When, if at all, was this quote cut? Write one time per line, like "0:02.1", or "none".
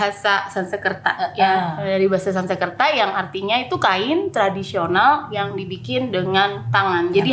none